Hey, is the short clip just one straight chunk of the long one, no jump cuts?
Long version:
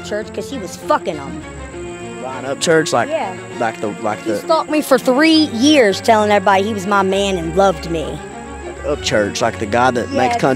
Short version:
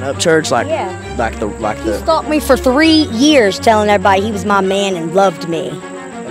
yes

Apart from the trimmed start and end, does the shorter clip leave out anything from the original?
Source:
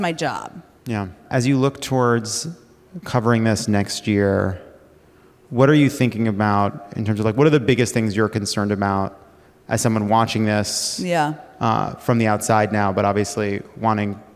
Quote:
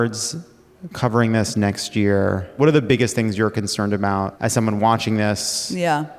yes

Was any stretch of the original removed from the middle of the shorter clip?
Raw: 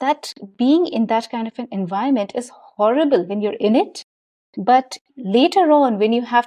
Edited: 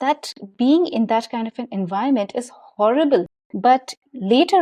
yes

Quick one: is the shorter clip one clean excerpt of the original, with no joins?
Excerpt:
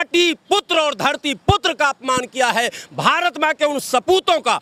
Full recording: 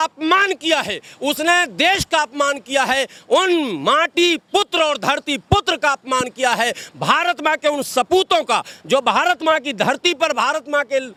yes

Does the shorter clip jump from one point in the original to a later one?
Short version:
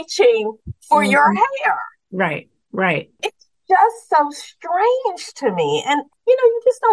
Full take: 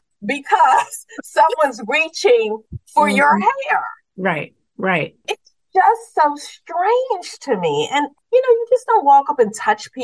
no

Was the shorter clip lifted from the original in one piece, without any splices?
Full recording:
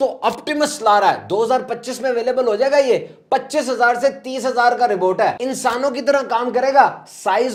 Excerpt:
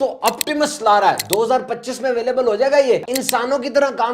no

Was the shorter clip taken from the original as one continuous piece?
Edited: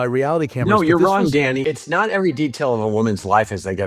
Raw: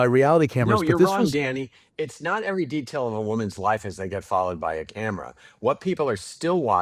no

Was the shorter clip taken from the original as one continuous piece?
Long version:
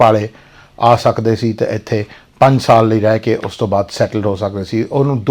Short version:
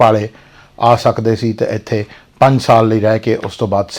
yes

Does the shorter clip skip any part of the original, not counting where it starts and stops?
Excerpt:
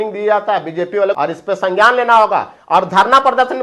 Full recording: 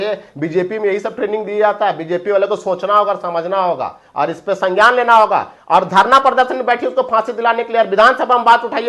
yes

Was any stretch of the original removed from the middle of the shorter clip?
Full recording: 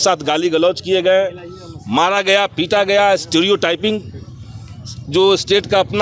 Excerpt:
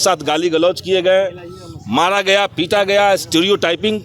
no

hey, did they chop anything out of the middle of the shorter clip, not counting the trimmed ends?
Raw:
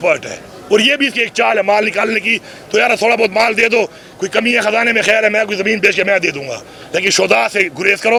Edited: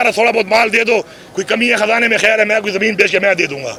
no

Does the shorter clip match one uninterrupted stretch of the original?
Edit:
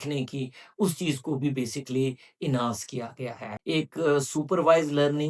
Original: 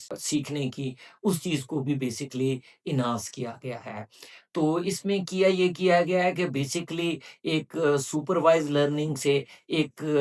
no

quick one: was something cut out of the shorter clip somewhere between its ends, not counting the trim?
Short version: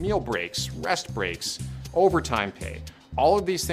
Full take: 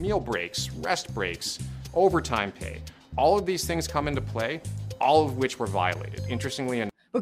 no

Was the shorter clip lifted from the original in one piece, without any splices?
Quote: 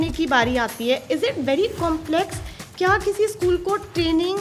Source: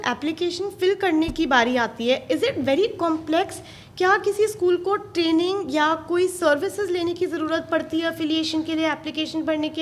yes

